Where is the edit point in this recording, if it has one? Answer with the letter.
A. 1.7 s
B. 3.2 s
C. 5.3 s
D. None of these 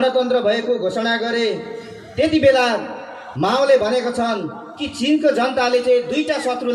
D